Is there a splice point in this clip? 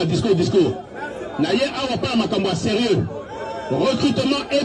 no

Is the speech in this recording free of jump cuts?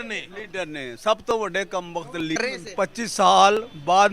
no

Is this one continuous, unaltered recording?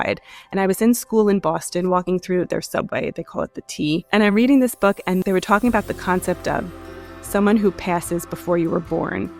no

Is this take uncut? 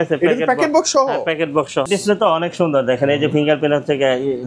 no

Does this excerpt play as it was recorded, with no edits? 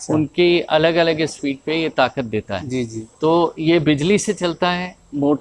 no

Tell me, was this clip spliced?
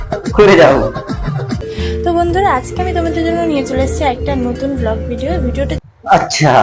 yes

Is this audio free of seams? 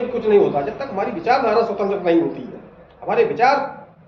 yes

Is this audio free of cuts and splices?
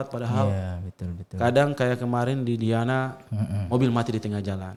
yes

